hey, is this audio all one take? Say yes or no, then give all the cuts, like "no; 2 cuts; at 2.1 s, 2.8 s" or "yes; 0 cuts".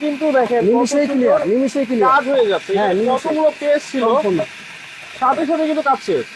yes; 0 cuts